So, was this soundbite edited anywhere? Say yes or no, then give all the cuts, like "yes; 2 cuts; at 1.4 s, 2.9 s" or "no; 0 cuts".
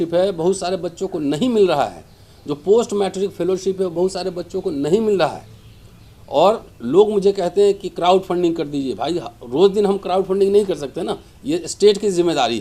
no; 0 cuts